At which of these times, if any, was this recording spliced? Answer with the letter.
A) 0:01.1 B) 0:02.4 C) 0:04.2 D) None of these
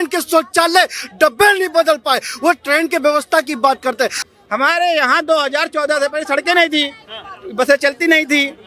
C